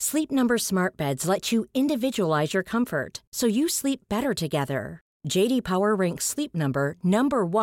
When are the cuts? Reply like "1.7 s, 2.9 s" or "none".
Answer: none

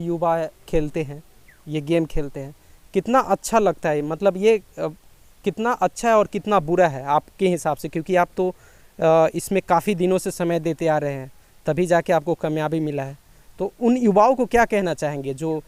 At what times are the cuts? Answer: none

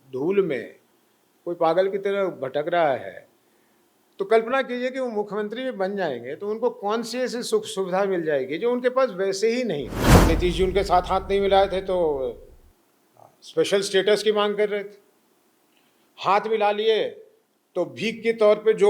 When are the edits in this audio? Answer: 10.2 s

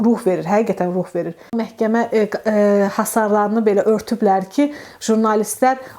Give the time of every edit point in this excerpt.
1.7 s

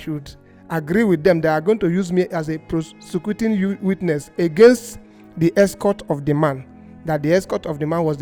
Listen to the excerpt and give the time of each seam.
none

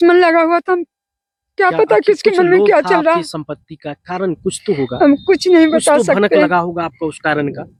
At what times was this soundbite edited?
none

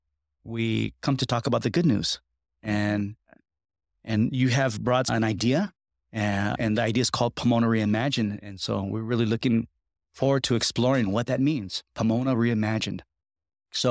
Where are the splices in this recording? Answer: 5.1 s

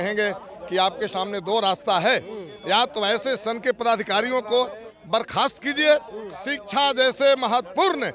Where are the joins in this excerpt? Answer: none

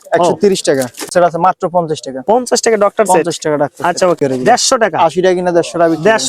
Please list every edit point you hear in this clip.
1.1 s, 4.2 s

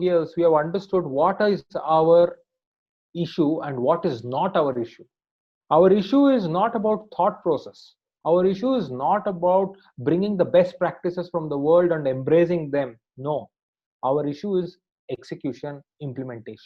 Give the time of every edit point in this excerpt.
none

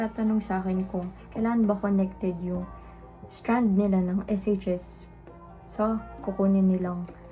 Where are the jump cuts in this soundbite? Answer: none

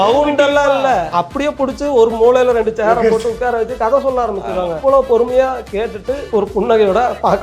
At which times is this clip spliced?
1.1 s, 4.7 s, 6.2 s

